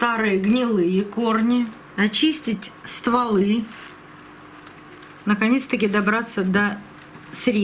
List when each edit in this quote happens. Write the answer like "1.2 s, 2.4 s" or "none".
1.8 s